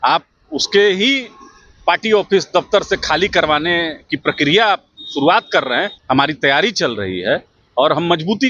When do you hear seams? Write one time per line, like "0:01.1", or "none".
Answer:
0:05.9